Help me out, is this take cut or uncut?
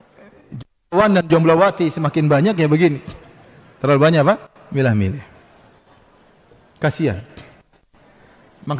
uncut